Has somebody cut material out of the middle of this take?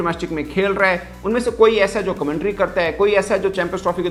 no; 0 cuts

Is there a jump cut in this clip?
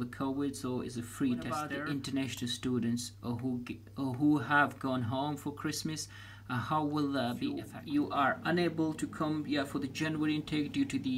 yes; 2 cuts; at 1.8 s, 7.7 s

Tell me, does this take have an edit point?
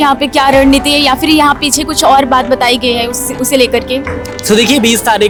no; 0 cuts

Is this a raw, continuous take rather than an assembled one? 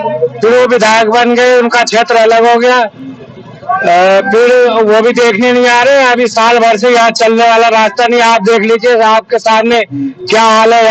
yes; 0 cuts

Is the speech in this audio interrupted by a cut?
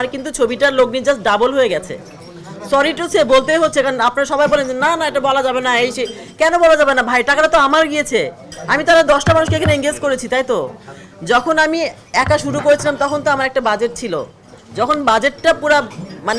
no; 0 cuts

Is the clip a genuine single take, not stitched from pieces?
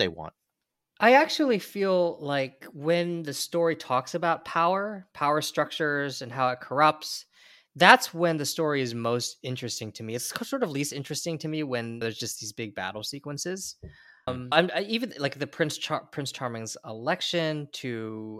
yes; 0 cuts

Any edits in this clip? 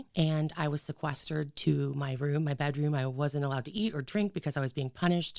no; 0 cuts

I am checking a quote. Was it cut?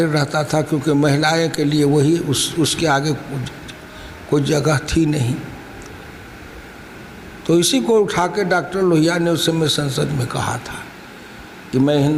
no; 0 cuts

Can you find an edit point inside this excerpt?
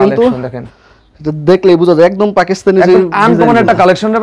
no; 0 cuts

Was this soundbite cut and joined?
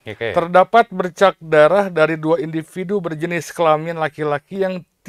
no; 0 cuts

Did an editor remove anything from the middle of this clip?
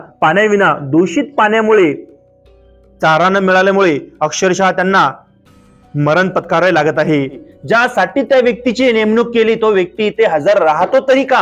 yes; 1 cut; at 7.5 s

